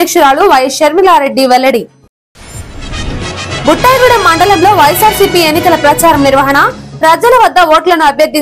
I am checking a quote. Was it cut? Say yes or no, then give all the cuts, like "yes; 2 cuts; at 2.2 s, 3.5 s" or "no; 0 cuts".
no; 0 cuts